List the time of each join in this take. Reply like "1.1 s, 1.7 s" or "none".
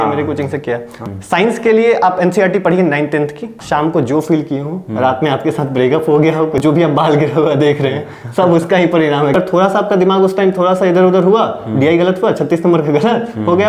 0.9 s, 3.5 s, 6.6 s, 9.3 s

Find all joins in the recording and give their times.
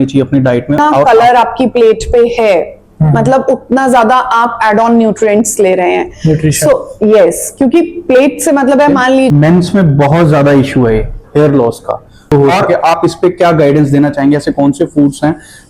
0.9 s, 9.3 s, 12.3 s

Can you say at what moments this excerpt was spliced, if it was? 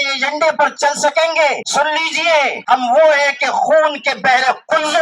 1.6 s, 2.6 s

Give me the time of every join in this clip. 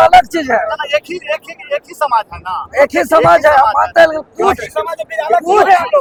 none

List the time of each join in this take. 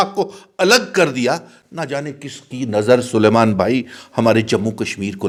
none

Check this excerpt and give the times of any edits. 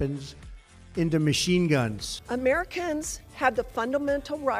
2.2 s

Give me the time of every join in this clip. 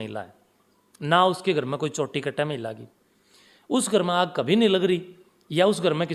none

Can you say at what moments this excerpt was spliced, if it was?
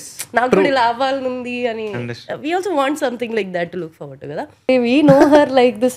4.7 s

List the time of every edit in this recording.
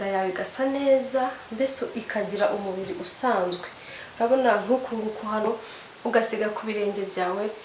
5.4 s

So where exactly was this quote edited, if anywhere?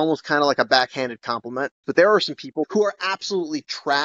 1.8 s, 2.7 s

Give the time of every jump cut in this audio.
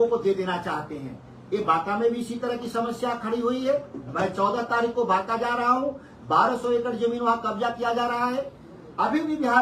none

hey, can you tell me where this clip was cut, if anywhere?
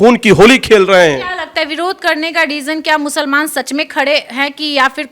none

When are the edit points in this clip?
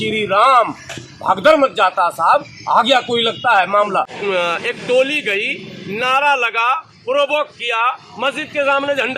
4.1 s

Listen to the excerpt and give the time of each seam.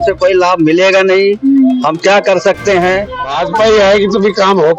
3.3 s

